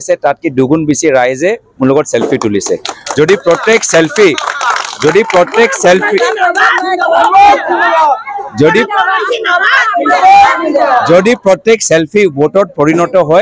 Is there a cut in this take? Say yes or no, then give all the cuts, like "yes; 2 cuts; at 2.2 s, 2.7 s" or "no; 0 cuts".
no; 0 cuts